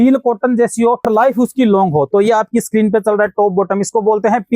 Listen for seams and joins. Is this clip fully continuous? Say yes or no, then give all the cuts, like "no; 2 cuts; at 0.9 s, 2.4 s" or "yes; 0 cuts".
no; 1 cut; at 1.0 s